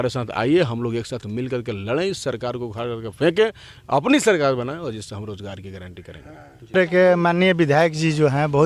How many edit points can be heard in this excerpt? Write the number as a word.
one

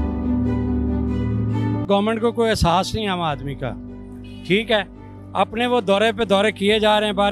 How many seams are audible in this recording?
one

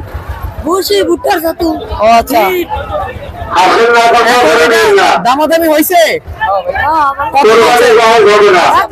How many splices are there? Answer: zero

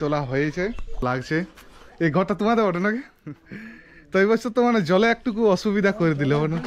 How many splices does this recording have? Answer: one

